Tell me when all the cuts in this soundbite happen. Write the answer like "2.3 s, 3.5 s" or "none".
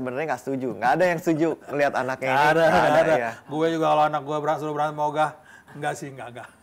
none

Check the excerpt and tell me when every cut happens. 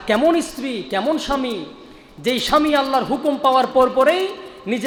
none

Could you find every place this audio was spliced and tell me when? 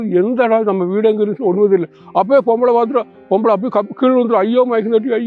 none

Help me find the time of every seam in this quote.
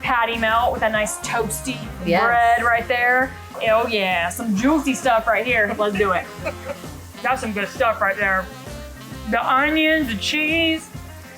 3.5 s, 7.0 s

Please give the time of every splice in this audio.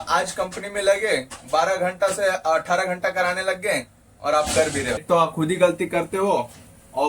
5.0 s

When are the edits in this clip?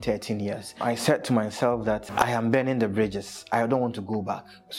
0.8 s, 2.0 s

